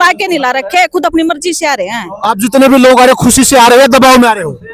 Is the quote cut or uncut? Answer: uncut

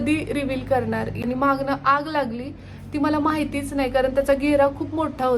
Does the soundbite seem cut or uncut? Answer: cut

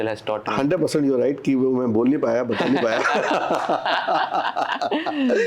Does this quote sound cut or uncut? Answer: uncut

